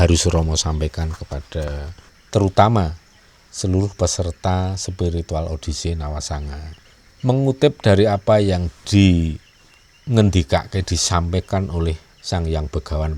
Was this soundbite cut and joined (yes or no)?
no